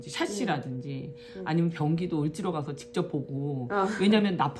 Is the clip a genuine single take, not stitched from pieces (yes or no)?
yes